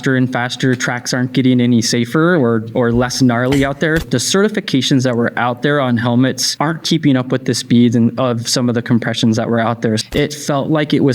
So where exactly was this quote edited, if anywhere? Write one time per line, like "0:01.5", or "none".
0:04.0
0:06.5
0:10.0